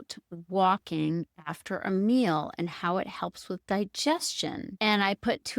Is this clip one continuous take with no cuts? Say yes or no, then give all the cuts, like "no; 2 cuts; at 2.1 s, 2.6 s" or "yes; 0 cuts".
no; 1 cut; at 4.7 s